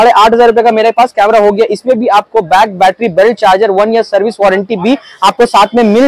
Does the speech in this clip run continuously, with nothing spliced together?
yes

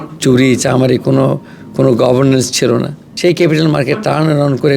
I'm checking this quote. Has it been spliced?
yes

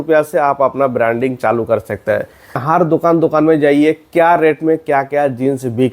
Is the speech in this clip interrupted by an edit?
yes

